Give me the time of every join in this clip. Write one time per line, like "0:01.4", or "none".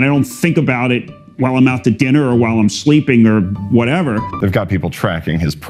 0:04.3